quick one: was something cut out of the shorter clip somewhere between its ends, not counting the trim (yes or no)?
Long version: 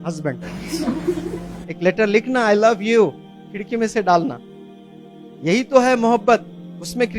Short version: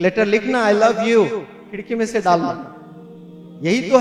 no